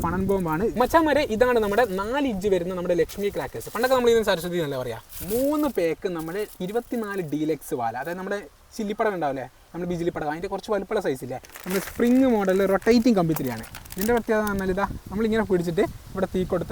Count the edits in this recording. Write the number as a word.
three